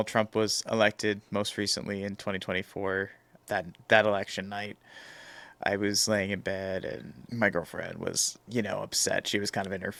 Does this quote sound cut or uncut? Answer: uncut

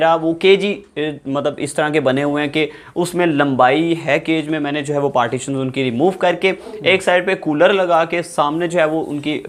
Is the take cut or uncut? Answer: uncut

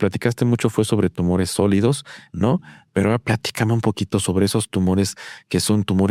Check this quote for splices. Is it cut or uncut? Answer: uncut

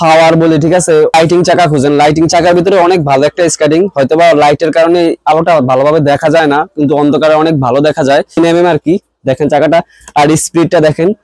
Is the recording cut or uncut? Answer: cut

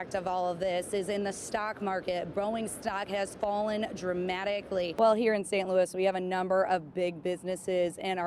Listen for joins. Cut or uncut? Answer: cut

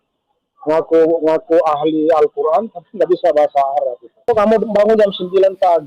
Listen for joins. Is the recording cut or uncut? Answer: cut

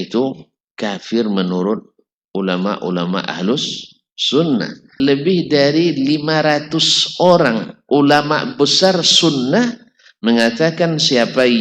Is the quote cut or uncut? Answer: cut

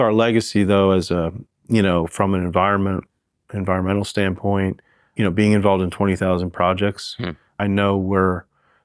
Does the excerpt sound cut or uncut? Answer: cut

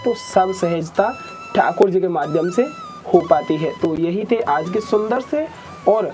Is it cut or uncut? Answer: uncut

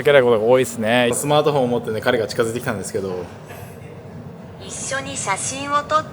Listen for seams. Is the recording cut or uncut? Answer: cut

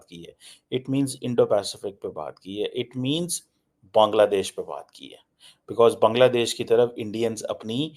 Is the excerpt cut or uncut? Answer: uncut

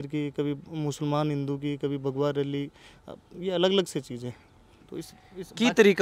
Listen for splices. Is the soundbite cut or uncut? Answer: uncut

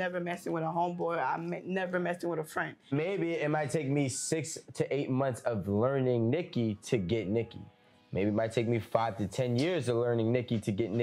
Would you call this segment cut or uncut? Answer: cut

